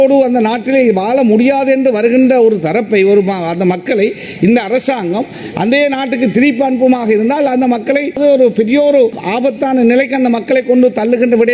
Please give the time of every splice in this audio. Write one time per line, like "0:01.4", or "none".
0:08.2
0:09.2